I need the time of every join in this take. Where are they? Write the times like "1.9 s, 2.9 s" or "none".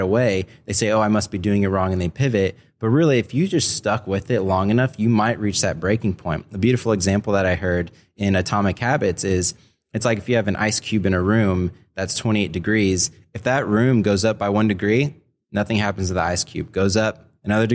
none